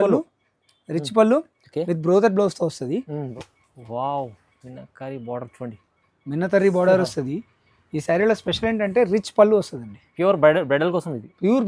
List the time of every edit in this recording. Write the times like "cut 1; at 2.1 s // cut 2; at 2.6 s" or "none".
cut 1; at 3.2 s